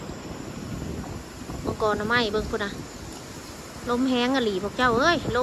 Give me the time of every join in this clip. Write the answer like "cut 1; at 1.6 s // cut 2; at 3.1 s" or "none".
none